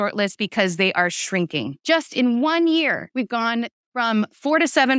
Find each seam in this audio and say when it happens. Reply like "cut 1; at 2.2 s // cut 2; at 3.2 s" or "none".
cut 1; at 1.8 s // cut 2; at 3.0 s

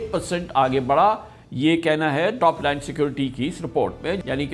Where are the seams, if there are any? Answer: none

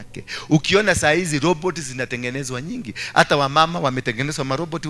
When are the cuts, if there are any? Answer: none

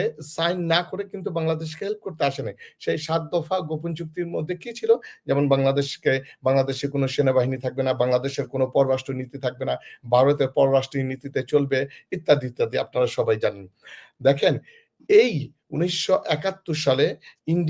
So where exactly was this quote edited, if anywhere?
none

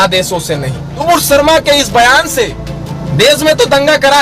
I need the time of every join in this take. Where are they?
cut 1; at 1.0 s

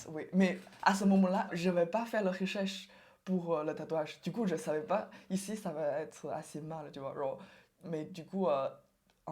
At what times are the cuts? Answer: cut 1; at 1.5 s

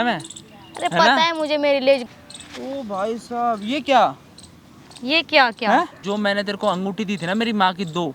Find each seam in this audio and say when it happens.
cut 1; at 2.0 s // cut 2; at 6.0 s

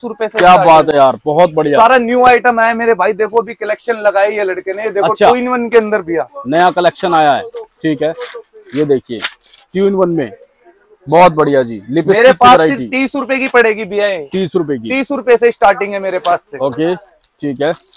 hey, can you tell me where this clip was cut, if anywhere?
none

